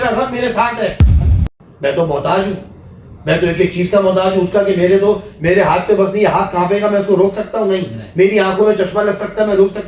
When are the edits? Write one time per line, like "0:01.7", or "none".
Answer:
0:01.1